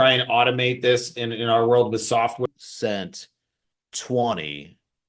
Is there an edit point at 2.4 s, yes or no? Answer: yes